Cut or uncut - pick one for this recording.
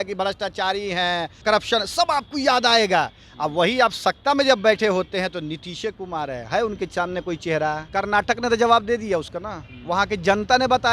cut